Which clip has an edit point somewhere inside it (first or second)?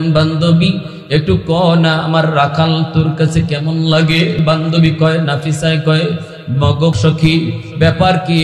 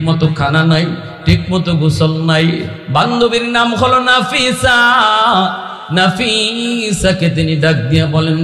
first